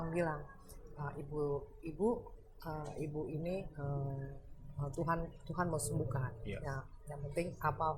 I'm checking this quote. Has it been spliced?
no; 0 cuts

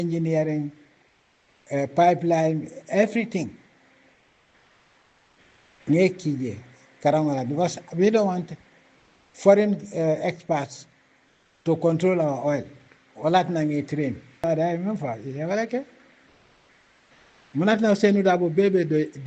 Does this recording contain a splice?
yes; 1 cut; at 14.4 s

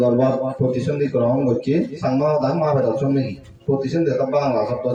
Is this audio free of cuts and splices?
yes; 0 cuts

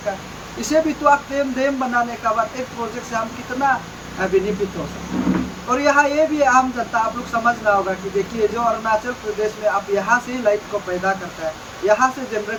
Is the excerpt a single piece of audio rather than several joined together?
yes; 0 cuts

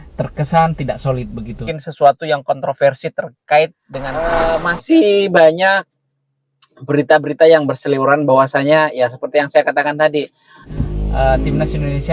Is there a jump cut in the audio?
yes; 1 cut; at 4.2 s

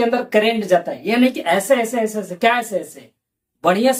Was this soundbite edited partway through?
no; 0 cuts

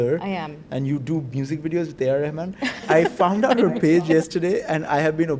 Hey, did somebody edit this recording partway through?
yes; 1 cut; at 2.9 s

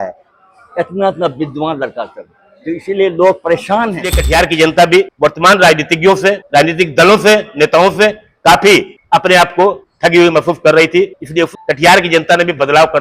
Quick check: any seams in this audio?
yes; 6 cuts; at 4.1 s, 5.1 s, 6.4 s, 9.0 s, 9.9 s, 11.4 s

